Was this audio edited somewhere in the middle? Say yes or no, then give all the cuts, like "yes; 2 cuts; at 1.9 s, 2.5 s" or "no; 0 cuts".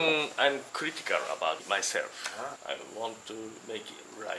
yes; 1 cut; at 1.6 s